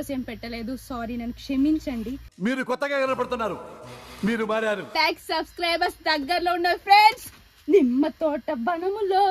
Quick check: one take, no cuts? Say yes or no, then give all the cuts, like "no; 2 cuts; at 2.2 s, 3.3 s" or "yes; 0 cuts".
no; 1 cut; at 4.9 s